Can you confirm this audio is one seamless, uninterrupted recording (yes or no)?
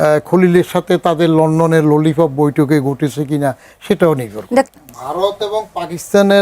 no